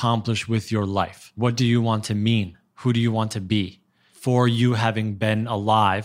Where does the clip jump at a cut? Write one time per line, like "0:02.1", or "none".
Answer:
0:01.2
0:04.1